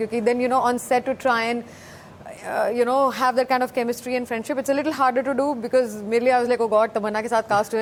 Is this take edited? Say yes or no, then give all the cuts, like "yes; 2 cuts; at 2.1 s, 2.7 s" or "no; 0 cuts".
no; 0 cuts